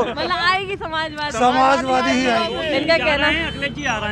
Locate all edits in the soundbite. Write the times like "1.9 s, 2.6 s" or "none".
none